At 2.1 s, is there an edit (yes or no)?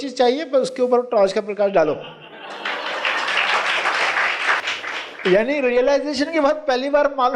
no